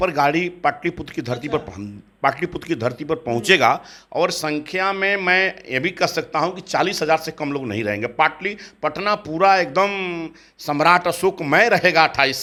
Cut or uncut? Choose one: uncut